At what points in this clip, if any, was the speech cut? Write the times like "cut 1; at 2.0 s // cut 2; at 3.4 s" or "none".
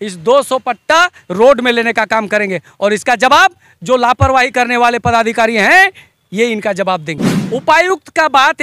cut 1; at 7.3 s